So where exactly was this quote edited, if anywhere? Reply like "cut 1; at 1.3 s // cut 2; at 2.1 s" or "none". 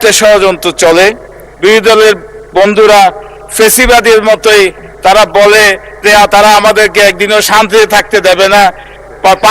cut 1; at 1.4 s

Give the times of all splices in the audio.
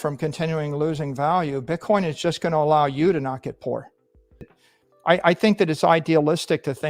cut 1; at 4.6 s

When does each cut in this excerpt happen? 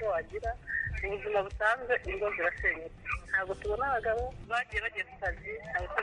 none

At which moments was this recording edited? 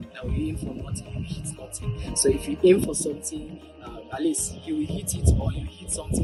none

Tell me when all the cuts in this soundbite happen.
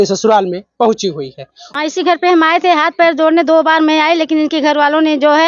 cut 1; at 1.7 s

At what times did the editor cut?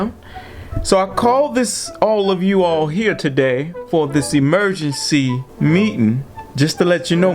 cut 1; at 5.4 s // cut 2; at 6.4 s

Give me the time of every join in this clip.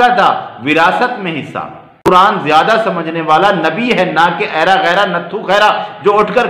cut 1; at 2.1 s

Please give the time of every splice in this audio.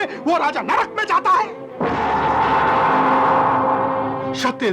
none

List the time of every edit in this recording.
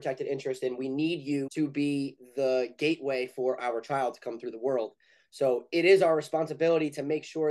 cut 1; at 1.5 s

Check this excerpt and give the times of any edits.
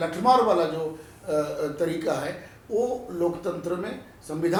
none

